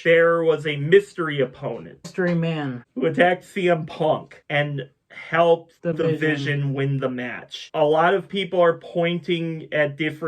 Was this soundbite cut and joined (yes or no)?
yes